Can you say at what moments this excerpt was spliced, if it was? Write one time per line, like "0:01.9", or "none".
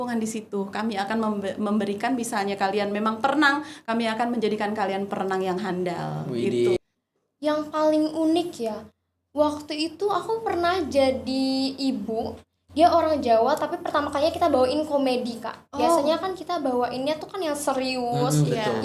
0:06.8